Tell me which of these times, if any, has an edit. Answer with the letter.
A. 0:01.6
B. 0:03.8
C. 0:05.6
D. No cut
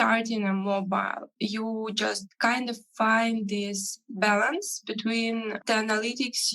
C